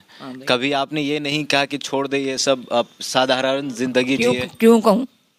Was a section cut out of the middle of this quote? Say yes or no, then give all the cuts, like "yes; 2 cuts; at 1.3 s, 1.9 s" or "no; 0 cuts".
no; 0 cuts